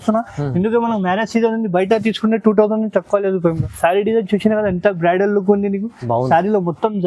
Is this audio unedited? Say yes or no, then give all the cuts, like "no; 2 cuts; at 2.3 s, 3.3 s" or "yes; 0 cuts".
no; 1 cut; at 3.5 s